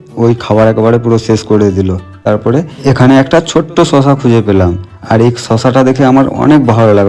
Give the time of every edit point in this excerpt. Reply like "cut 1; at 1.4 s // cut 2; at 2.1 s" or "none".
cut 1; at 2.2 s